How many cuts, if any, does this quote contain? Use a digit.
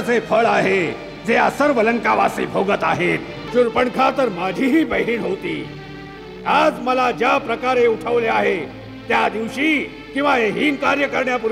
1